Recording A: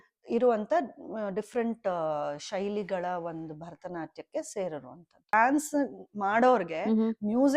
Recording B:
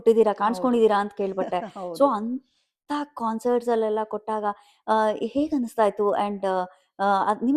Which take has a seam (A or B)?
A